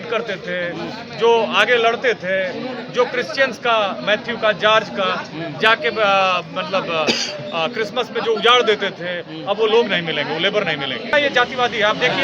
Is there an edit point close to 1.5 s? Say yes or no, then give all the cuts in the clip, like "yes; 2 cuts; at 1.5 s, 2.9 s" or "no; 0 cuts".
no; 1 cut; at 11.1 s